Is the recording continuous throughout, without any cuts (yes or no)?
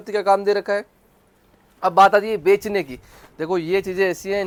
yes